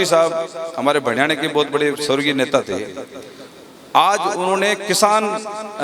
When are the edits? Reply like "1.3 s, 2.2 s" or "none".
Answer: none